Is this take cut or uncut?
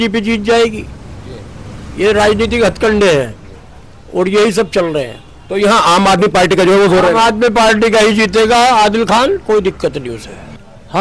uncut